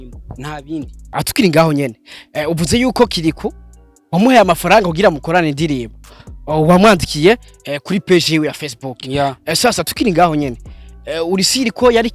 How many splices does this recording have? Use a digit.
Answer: 1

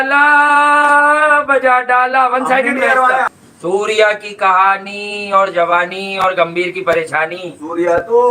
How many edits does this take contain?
1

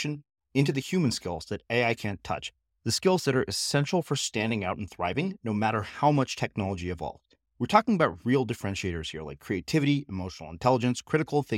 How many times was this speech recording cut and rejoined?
0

